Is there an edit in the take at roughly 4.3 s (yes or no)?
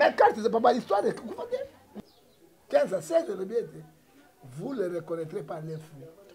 no